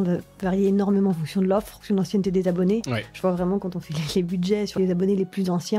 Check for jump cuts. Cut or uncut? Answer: cut